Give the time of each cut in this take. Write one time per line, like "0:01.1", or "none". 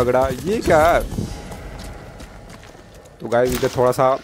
none